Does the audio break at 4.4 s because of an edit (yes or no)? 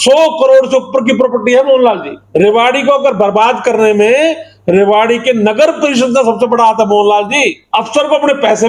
no